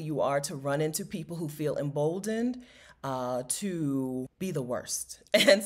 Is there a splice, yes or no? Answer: yes